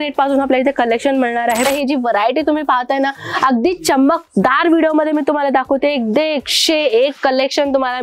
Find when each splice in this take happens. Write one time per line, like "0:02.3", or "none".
0:01.7